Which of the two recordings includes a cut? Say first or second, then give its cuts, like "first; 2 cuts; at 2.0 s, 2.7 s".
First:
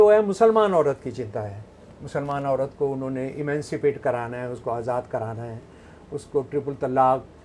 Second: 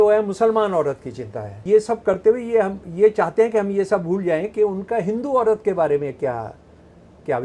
second; 1 cut; at 1.6 s